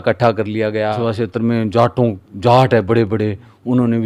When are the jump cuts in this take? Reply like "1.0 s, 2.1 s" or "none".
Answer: 1.0 s